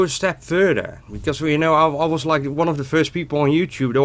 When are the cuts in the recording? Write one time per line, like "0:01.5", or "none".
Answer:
none

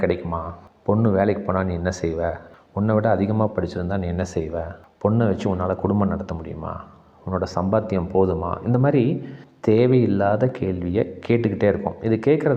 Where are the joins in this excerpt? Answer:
0:04.8

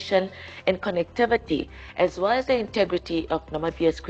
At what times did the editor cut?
0:02.9

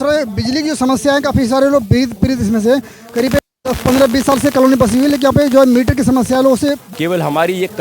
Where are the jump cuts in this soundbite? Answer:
0:06.8

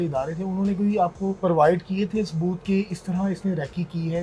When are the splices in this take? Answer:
0:01.4

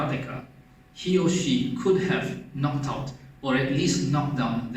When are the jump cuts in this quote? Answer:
none

